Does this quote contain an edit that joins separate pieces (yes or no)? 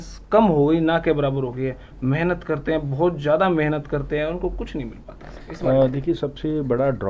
no